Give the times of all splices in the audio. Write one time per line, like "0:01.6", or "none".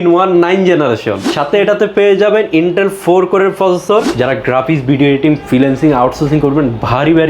0:04.1